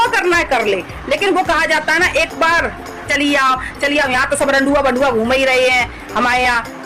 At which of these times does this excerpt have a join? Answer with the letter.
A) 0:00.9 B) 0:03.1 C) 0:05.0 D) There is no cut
B